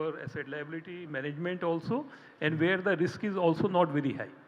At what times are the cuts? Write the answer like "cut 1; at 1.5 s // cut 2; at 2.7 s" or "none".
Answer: none